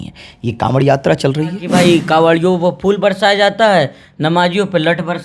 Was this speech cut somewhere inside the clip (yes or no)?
yes